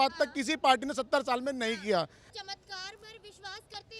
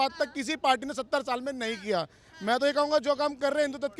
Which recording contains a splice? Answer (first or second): first